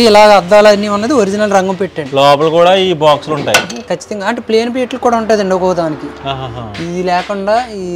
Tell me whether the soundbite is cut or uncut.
uncut